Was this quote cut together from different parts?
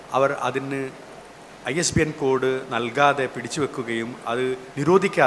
no; 0 cuts

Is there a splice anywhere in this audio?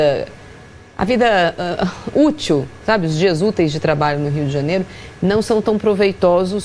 no; 0 cuts

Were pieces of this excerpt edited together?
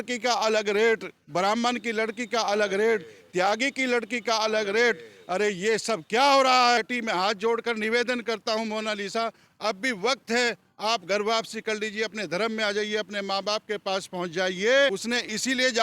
yes; 2 cuts; at 6.8 s, 14.9 s

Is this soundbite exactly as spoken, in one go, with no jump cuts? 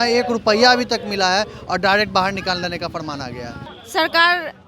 no; 1 cut; at 3.6 s

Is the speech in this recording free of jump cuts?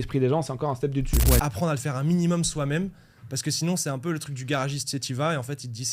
no; 1 cut; at 1.4 s

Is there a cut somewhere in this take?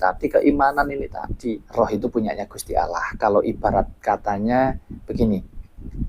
yes; 1 cut; at 1.6 s

